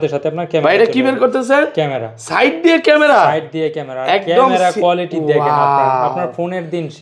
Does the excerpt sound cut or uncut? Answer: uncut